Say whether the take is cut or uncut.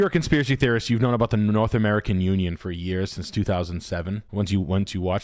uncut